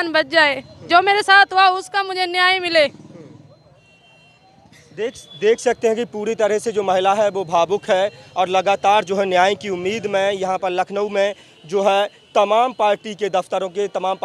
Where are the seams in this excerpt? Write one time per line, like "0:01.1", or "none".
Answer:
none